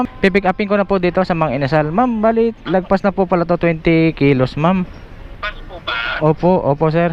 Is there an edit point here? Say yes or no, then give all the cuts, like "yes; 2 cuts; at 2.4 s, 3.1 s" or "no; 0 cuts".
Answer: no; 0 cuts